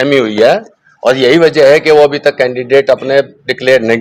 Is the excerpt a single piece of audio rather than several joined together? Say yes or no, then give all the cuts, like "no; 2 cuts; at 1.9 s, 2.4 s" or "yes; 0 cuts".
yes; 0 cuts